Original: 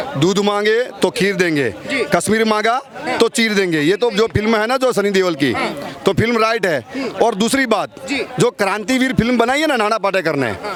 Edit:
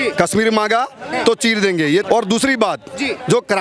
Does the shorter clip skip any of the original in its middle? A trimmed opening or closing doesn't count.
yes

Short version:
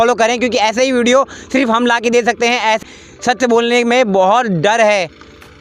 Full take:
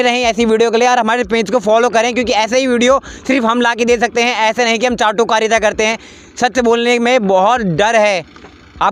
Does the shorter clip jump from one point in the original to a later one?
yes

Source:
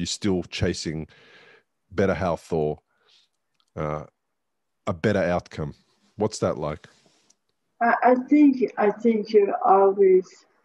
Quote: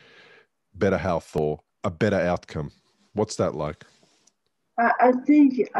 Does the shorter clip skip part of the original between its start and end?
yes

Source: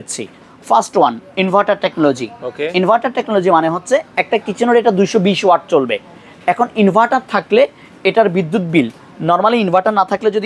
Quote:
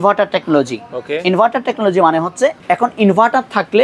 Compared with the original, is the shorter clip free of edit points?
no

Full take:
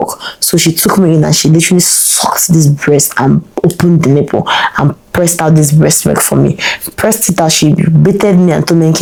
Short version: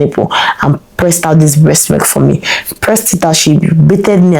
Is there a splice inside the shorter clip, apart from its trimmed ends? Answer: no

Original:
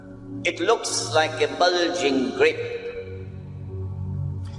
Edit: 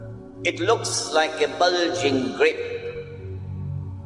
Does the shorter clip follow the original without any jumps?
no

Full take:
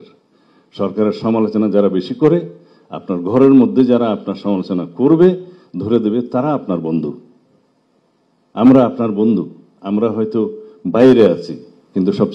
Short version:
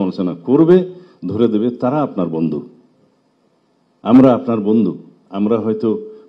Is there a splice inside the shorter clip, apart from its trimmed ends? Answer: no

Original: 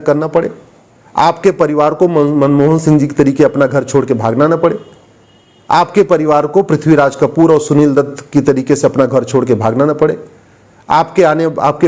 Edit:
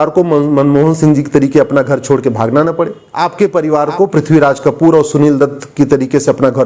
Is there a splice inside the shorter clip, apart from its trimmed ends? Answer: yes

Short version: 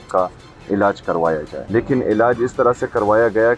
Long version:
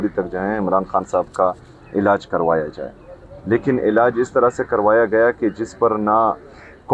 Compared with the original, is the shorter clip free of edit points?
no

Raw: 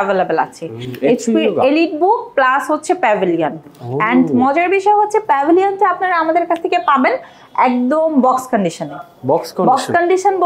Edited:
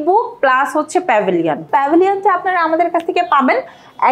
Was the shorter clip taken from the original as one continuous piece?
no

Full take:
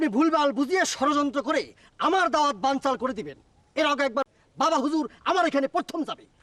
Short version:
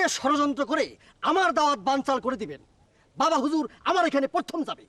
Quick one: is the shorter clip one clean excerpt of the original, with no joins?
no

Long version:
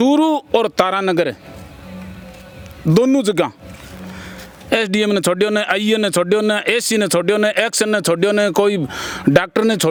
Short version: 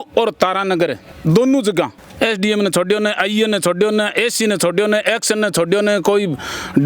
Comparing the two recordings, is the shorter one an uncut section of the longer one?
no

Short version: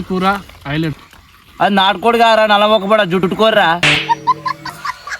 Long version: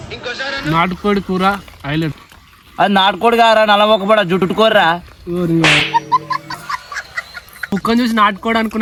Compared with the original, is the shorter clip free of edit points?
no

